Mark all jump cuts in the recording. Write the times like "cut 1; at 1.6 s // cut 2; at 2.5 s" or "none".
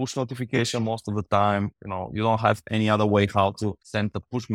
none